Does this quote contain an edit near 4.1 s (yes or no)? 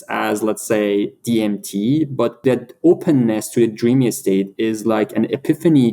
no